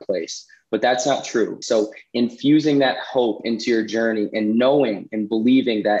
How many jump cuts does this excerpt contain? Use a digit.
1